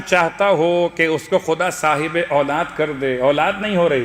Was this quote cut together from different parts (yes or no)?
no